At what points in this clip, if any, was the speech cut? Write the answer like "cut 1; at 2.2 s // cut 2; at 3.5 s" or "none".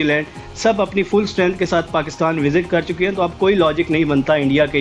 none